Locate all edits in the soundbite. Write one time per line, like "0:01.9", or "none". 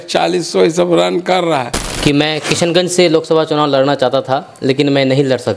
0:01.8